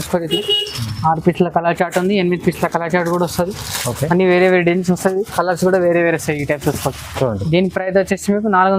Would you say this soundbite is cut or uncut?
uncut